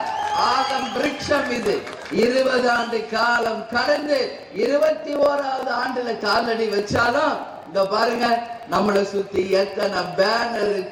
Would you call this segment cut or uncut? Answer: uncut